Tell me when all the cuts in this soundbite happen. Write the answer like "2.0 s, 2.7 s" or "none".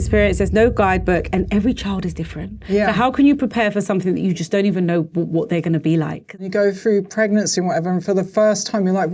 6.4 s